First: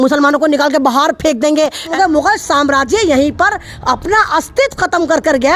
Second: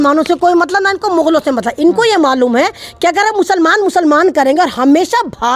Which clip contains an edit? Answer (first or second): first